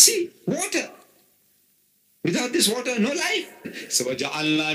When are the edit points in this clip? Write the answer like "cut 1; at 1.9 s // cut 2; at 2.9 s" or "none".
cut 1; at 3.8 s

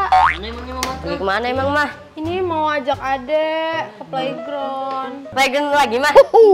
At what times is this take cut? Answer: cut 1; at 5.2 s

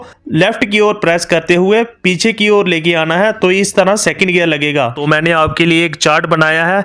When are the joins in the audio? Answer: cut 1; at 5.0 s

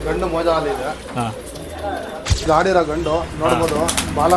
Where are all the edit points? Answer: cut 1; at 2.5 s

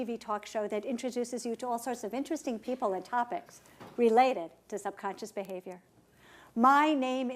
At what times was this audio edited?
cut 1; at 3.9 s

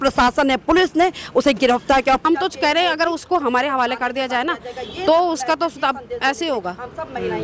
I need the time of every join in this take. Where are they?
cut 1; at 2.2 s

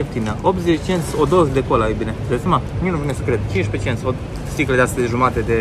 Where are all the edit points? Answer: none

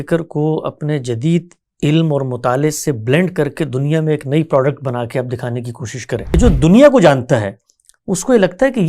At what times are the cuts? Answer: cut 1; at 6.3 s

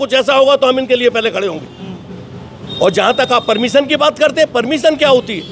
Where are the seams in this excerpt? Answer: none

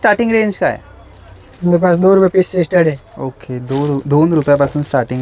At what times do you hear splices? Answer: none

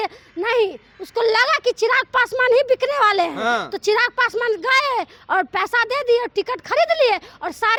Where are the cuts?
none

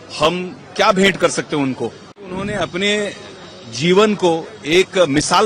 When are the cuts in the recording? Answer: cut 1; at 2.4 s

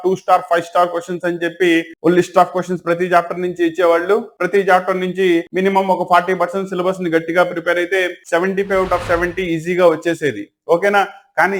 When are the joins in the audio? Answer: none

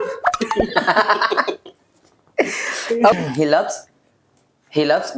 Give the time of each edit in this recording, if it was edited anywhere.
cut 1; at 3.1 s

